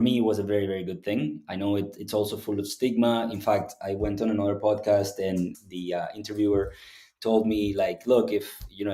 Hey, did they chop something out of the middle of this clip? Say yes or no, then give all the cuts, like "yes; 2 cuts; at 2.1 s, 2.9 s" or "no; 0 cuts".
yes; 1 cut; at 5.6 s